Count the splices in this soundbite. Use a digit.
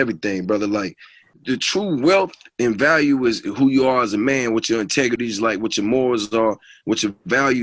1